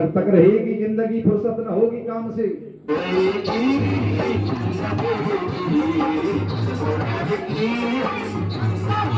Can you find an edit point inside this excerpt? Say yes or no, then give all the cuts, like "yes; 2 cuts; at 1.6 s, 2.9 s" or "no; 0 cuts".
no; 0 cuts